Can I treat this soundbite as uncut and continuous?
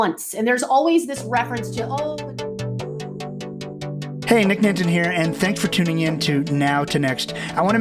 no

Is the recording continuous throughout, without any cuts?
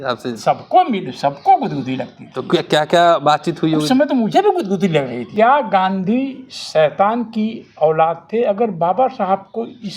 no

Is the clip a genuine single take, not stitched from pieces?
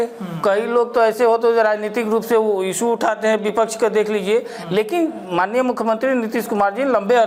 yes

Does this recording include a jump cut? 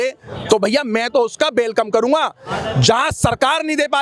no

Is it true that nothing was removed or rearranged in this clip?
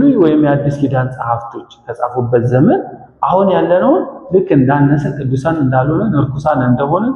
yes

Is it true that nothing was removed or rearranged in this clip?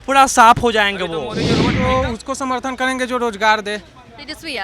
no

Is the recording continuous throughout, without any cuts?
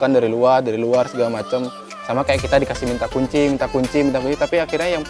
yes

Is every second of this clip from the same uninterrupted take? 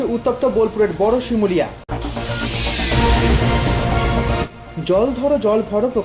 no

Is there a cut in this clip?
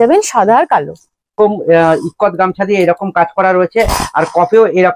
yes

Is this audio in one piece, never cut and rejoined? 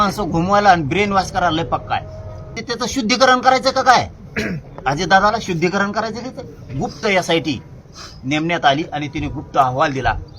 no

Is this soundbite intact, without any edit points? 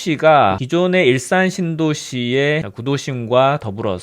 no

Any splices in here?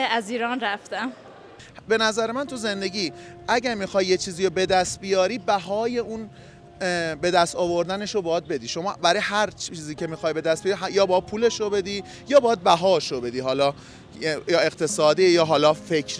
yes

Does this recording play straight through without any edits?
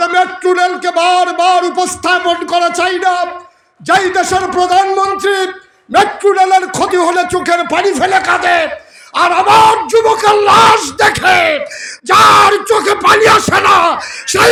yes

